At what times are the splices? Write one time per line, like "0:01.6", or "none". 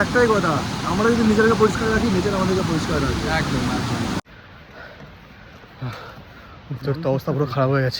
0:04.2